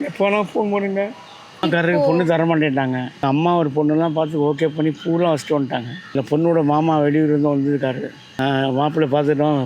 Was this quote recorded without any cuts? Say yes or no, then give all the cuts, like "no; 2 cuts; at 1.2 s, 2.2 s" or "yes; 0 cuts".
no; 4 cuts; at 1.6 s, 3.2 s, 6.1 s, 8.2 s